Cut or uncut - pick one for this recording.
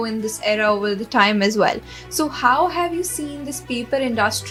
uncut